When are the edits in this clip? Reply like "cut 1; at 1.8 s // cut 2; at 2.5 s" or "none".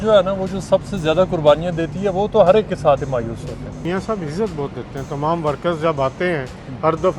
cut 1; at 3.8 s